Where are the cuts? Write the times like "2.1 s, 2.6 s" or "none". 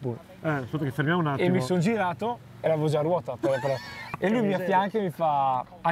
3.9 s